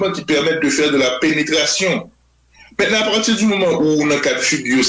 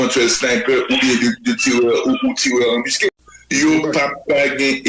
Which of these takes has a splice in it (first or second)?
second